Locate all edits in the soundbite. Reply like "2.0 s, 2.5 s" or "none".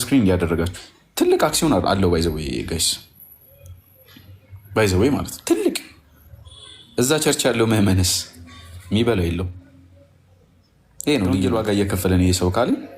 11.4 s

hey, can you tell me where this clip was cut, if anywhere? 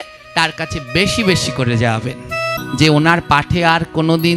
2.6 s

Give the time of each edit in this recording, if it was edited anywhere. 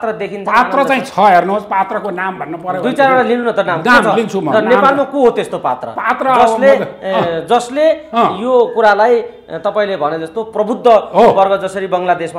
none

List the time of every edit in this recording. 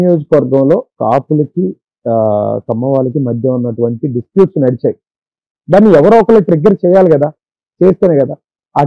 0.9 s

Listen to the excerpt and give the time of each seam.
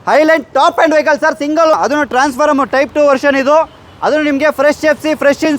1.8 s

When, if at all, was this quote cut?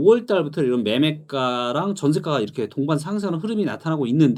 none

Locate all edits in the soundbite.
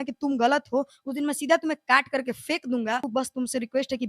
3.1 s

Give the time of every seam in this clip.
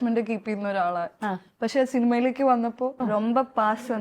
3.0 s

